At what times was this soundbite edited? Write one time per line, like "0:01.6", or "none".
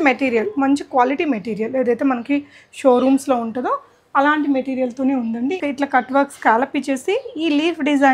0:05.6